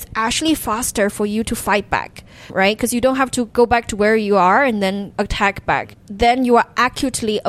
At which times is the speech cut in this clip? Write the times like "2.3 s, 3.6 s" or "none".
2.5 s, 3.5 s, 5.1 s, 6.0 s